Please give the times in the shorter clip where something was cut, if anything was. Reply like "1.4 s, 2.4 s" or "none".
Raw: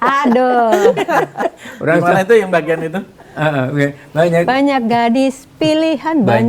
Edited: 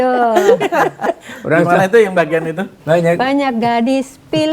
2.7 s